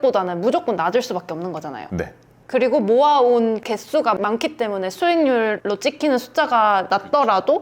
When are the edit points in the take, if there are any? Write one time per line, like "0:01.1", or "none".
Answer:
0:03.6
0:05.6
0:06.9